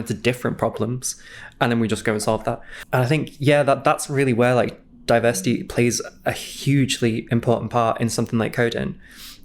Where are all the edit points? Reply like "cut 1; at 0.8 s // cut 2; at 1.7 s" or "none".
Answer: cut 1; at 2.7 s // cut 2; at 6.5 s